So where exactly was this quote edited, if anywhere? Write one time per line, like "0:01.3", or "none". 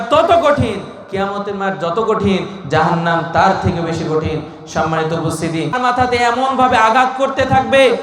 0:05.7